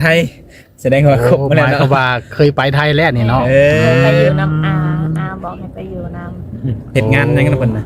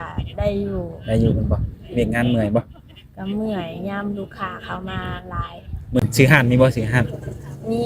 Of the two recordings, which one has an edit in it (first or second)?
second